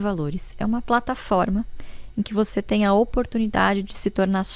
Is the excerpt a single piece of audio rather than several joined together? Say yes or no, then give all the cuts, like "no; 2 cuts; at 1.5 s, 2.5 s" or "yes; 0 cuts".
yes; 0 cuts